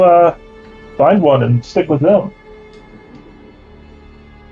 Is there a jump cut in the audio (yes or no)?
no